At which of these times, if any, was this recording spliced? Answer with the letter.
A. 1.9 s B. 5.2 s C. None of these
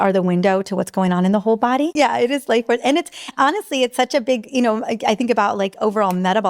A